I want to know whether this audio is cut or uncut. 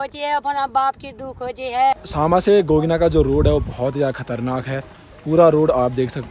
cut